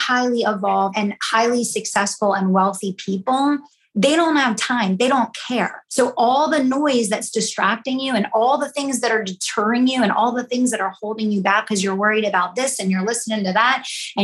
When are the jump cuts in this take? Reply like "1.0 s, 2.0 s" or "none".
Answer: 0.9 s, 5.8 s

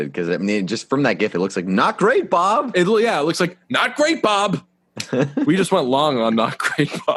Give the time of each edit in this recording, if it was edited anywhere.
none

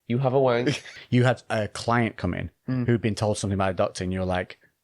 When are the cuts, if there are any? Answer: 0.9 s

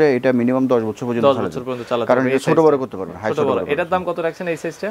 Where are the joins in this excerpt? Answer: none

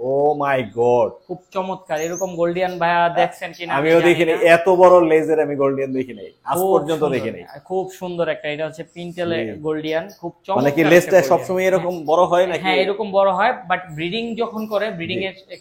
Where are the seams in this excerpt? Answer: none

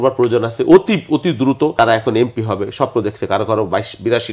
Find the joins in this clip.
1.7 s

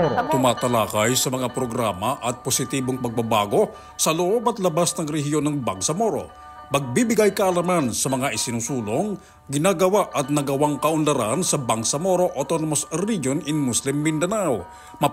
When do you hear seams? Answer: none

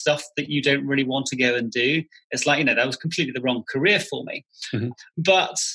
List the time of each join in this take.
none

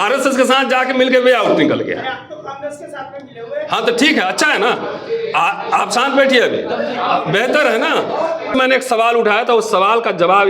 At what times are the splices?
8.5 s

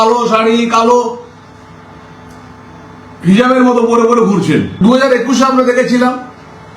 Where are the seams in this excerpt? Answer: 4.7 s

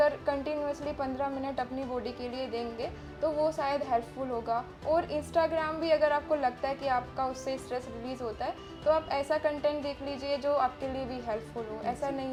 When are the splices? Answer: none

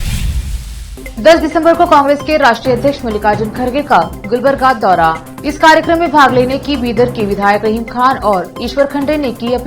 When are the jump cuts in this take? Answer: 0.9 s

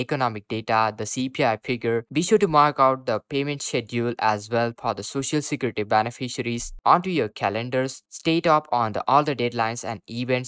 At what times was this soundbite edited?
none

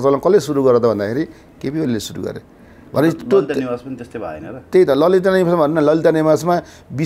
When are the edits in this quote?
none

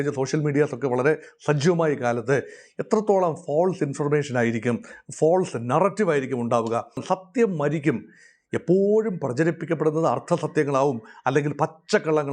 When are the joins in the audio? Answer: 7.0 s

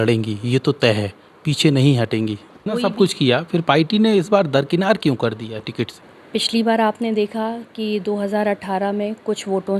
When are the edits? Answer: 2.5 s, 6.1 s

